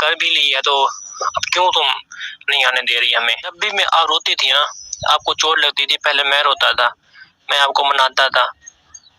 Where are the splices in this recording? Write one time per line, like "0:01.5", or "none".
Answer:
0:03.5